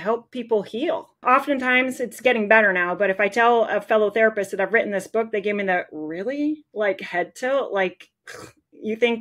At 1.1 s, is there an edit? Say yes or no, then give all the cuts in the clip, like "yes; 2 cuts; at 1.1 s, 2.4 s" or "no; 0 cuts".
yes; 1 cut; at 1.1 s